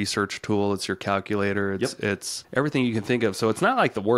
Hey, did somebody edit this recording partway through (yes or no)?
yes